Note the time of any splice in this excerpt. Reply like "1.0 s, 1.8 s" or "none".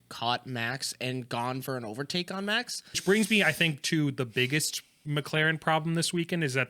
3.0 s